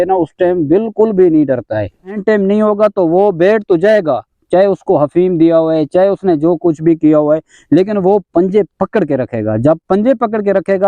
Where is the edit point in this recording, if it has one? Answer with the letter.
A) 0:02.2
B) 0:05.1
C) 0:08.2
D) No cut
A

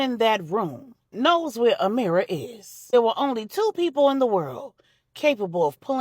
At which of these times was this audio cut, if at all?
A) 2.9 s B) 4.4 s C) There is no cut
A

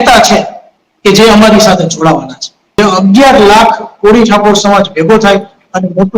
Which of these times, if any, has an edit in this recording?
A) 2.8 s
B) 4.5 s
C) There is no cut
A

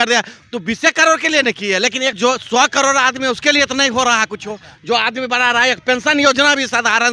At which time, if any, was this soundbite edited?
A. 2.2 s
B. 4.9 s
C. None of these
A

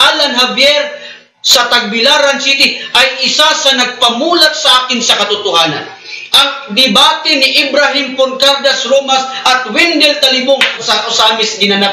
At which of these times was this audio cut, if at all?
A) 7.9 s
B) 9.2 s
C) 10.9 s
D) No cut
C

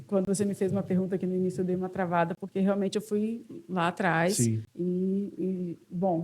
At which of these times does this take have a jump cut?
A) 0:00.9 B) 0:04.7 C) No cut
B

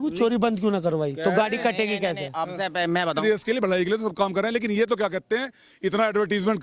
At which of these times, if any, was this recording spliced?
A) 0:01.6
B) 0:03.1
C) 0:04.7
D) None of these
B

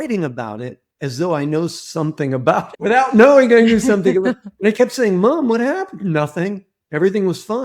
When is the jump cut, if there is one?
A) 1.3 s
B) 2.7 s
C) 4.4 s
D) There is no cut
B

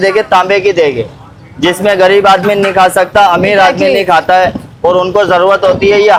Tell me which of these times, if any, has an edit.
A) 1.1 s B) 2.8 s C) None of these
C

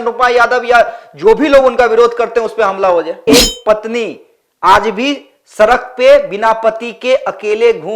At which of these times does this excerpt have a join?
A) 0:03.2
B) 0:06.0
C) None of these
A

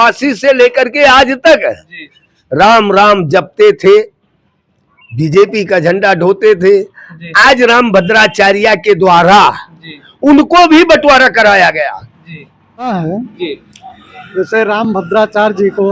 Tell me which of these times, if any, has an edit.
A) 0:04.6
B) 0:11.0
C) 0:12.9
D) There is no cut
C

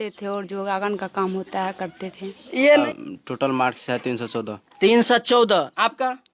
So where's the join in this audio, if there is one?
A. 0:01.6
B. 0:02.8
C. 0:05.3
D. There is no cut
B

